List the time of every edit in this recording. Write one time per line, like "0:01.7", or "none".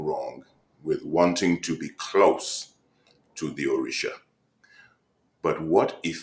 none